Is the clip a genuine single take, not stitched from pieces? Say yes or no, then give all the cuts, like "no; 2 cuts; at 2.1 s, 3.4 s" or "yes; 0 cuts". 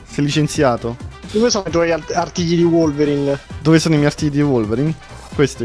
no; 1 cut; at 1.2 s